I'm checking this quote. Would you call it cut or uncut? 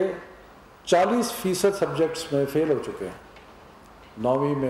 uncut